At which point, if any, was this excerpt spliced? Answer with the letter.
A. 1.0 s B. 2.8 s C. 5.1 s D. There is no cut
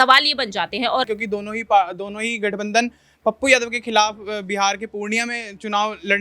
A